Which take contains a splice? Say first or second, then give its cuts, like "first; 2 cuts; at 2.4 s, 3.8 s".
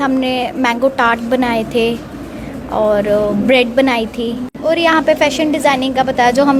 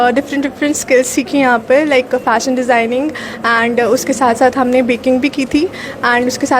first; 1 cut; at 4.5 s